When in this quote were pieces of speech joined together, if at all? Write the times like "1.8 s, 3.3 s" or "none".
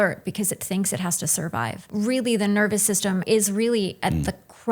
1.8 s, 3.2 s